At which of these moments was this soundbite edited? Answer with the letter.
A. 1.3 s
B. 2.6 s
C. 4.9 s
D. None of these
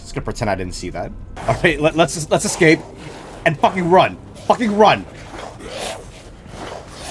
A